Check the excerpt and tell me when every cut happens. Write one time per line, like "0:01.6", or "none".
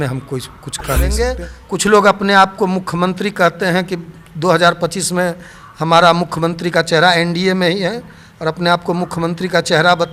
0:01.1